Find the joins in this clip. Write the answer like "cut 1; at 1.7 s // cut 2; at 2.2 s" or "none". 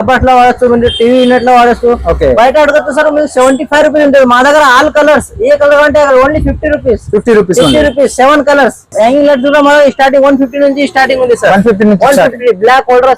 cut 1; at 8.9 s